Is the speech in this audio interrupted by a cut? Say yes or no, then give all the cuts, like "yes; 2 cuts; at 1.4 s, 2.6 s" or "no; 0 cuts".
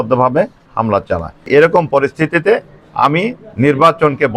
yes; 1 cut; at 1.4 s